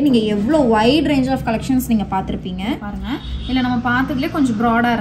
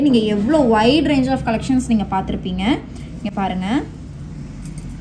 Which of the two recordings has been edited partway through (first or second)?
first